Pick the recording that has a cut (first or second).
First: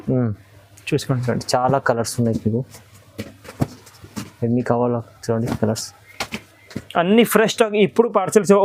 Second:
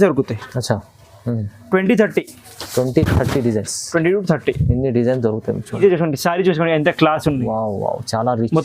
second